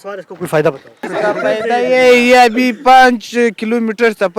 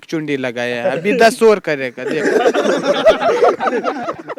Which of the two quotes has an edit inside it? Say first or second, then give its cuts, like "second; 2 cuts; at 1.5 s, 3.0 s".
first; 1 cut; at 1.1 s